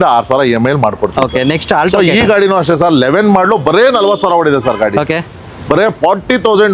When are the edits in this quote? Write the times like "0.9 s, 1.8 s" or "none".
none